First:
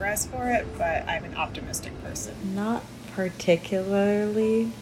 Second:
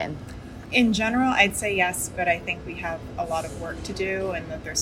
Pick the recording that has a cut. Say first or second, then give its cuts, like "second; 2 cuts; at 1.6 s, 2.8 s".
first; 1 cut; at 2.3 s